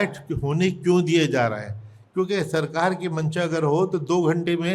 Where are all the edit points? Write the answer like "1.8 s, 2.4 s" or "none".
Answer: none

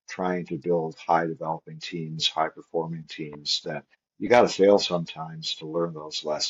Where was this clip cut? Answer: 4.0 s

